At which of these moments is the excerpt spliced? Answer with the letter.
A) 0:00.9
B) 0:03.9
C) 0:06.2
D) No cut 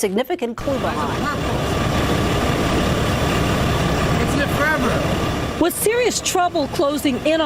A